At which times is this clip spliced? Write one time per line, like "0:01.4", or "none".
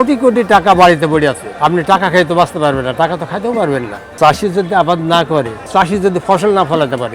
0:01.5
0:04.2
0:05.7

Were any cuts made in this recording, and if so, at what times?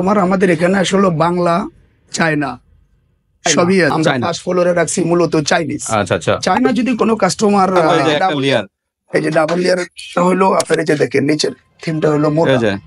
0:03.9
0:07.9

